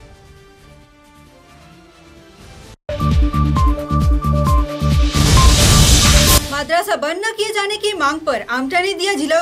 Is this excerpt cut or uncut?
cut